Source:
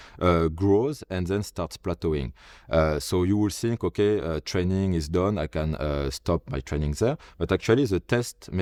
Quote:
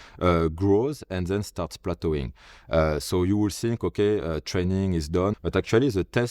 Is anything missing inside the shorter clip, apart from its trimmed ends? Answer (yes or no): yes